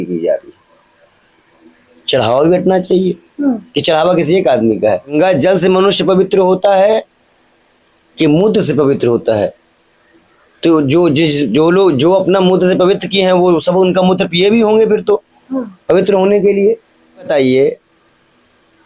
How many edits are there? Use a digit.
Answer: 3